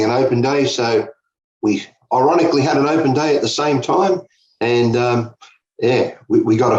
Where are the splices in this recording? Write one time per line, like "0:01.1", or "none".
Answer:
0:02.0